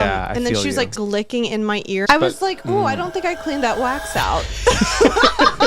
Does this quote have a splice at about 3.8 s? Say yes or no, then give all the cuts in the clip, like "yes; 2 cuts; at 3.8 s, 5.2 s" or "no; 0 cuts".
no; 2 cuts; at 1.0 s, 2.0 s